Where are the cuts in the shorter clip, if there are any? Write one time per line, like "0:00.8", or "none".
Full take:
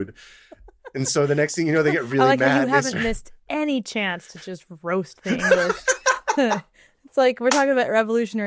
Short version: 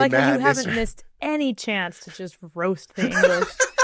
none